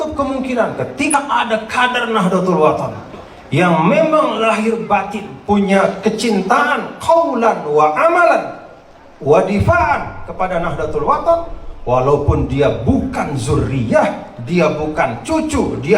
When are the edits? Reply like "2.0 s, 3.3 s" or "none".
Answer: 1.1 s

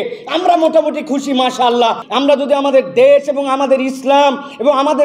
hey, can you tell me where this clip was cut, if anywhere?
2.0 s

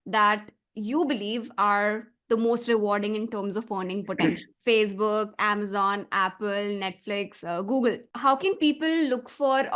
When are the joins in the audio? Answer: 4.5 s, 8.1 s

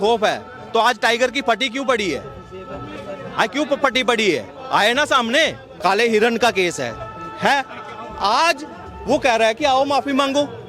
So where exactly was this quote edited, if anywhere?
5.6 s

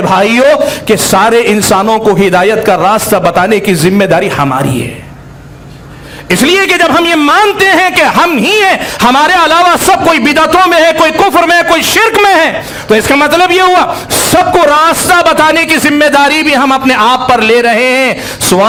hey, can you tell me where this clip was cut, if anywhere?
none

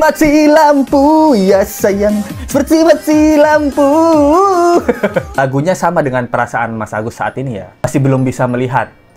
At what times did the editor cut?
5.4 s

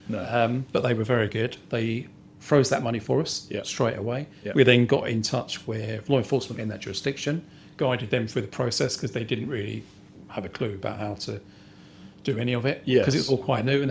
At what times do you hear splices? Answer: none

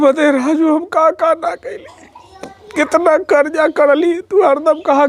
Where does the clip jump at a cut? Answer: none

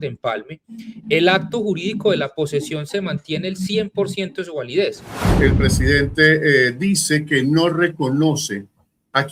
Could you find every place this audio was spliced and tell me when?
5.3 s

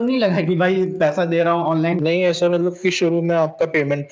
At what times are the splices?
2.0 s

